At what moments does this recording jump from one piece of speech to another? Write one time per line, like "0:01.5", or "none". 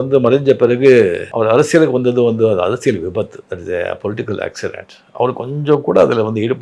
none